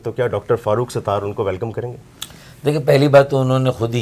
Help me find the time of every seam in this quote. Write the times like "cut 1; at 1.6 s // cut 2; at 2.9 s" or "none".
none